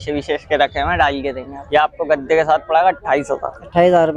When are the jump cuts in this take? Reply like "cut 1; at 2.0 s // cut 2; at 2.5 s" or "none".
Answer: cut 1; at 1.5 s